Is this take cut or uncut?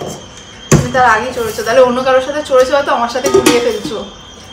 uncut